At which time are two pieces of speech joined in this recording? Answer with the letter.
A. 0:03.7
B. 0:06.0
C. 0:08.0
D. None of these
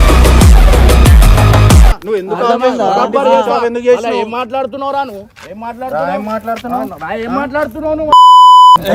D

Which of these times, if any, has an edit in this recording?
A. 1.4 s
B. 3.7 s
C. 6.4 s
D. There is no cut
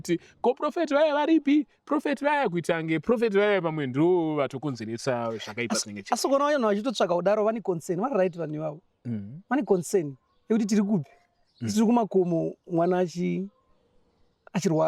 D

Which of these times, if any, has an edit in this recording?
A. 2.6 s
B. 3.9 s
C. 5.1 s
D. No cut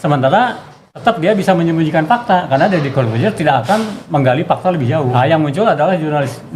C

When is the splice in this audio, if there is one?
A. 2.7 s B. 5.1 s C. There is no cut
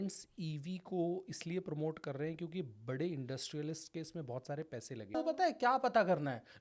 B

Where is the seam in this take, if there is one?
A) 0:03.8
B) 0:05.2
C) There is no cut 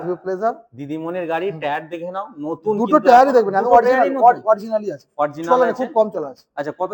C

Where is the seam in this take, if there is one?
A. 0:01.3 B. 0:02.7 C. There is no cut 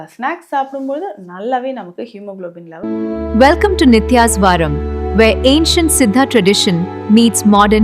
B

